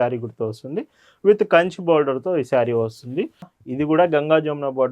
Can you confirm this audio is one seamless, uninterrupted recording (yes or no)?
no